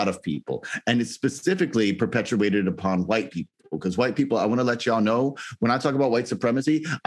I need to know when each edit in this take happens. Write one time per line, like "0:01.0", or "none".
none